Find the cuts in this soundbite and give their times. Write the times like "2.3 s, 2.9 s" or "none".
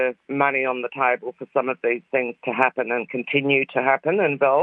none